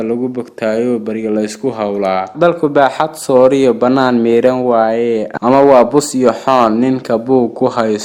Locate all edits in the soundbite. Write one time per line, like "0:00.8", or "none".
0:02.3